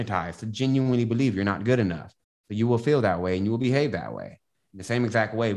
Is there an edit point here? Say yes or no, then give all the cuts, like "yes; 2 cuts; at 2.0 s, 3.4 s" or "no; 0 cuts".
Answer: no; 0 cuts